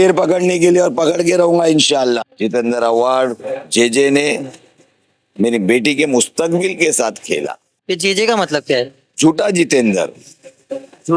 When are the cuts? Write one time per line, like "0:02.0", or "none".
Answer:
0:02.3
0:07.8